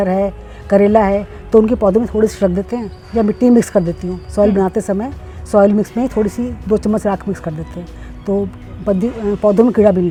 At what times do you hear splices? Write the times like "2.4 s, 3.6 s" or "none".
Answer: none